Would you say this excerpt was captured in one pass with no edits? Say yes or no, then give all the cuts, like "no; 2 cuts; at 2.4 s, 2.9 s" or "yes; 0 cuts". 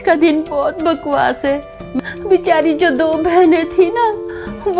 no; 1 cut; at 1.9 s